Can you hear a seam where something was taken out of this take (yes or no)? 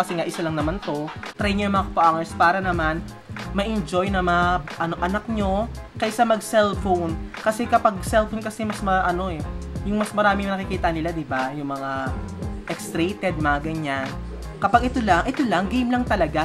yes